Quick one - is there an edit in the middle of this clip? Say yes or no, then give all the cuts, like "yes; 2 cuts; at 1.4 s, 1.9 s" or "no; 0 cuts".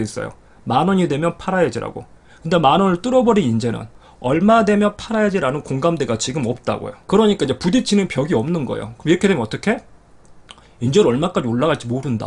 no; 0 cuts